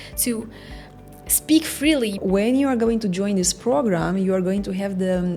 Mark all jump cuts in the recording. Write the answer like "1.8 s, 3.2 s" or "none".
2.2 s